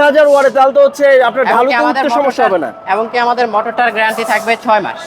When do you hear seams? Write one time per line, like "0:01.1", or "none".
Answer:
none